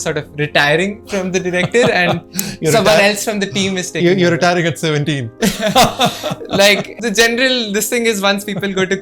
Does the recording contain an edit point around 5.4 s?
no; 1 cut; at 6.9 s

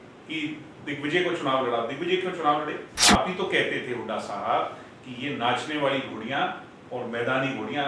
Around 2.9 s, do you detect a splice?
yes; 1 cut; at 2.9 s

